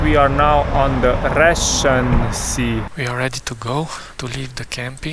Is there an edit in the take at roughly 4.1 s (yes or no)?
yes